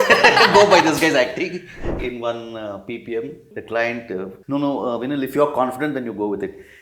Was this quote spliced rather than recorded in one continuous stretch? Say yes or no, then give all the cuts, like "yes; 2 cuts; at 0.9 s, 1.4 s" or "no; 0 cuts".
yes; 3 cuts; at 2.0 s, 3.5 s, 4.4 s